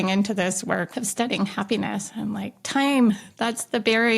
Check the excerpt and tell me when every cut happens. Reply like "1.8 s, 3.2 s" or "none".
0.9 s